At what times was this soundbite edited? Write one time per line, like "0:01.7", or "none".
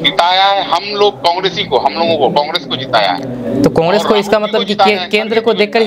none